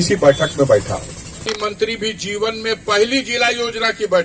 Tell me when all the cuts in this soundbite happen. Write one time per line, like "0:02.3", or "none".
0:01.5